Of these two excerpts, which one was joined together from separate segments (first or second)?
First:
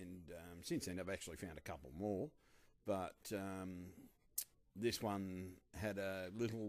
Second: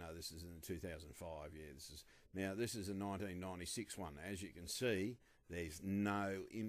second